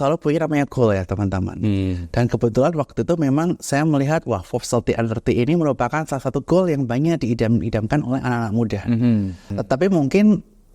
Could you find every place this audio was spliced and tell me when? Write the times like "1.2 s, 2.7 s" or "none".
9.5 s